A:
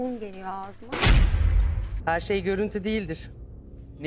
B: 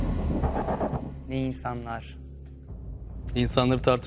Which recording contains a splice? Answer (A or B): A